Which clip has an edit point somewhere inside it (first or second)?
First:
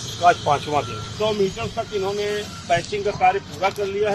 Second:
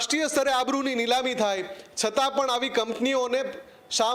first